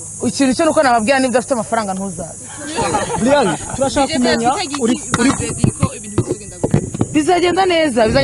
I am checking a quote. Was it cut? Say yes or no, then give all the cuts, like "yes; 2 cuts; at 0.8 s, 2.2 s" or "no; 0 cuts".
no; 0 cuts